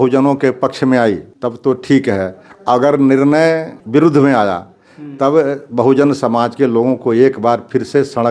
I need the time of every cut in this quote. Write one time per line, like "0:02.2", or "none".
0:01.3
0:03.7

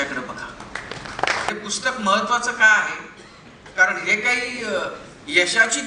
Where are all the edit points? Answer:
0:01.5

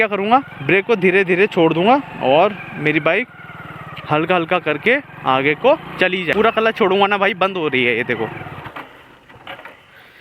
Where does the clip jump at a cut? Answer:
0:06.3

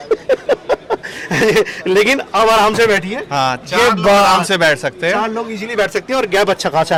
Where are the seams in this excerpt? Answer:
none

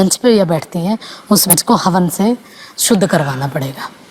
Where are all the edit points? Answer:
0:01.5

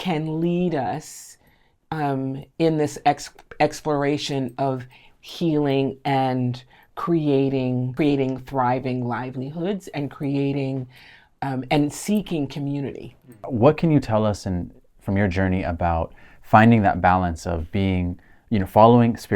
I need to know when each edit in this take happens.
0:07.9
0:13.5

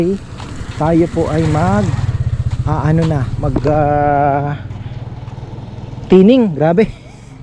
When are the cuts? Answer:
none

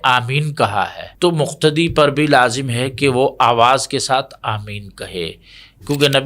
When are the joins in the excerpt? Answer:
0:01.0

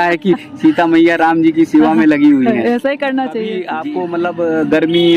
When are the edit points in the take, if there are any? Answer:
0:03.6

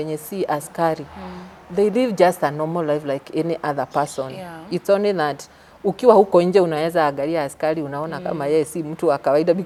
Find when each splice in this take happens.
none

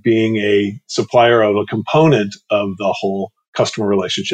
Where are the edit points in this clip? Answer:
none

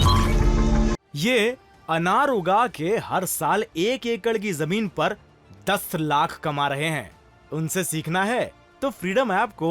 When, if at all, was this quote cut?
0:01.0

